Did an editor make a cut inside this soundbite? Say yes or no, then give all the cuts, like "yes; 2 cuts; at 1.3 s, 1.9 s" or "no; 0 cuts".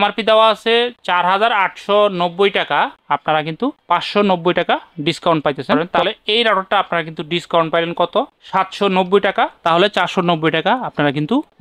yes; 2 cuts; at 5.9 s, 9.6 s